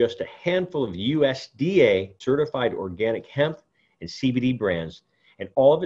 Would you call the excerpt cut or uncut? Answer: cut